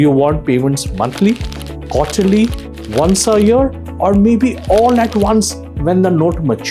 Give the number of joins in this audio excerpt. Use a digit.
0